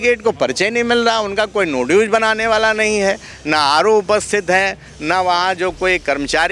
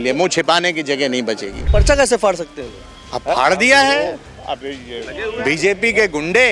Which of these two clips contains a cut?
second; 1 cut; at 1.6 s

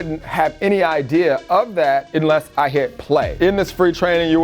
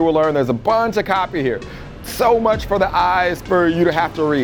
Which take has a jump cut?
first; 1 cut; at 3.3 s

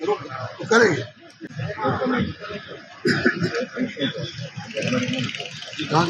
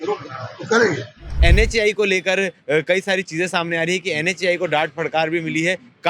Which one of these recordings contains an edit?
second; 1 cut; at 1.3 s

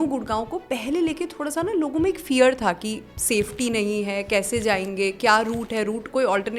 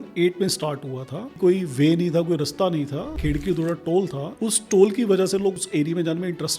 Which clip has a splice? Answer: second; 4 cuts; at 1.4 s, 3.2 s, 4.2 s, 5.5 s

